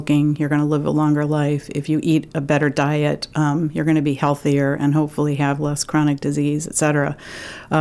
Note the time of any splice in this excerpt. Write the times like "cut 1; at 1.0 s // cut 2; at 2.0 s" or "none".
none